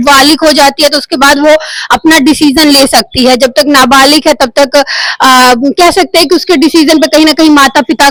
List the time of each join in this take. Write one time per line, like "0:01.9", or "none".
none